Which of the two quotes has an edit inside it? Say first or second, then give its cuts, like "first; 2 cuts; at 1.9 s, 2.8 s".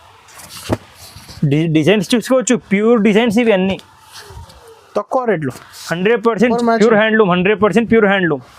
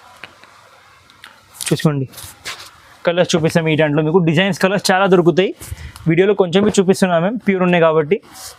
first; 1 cut; at 6.5 s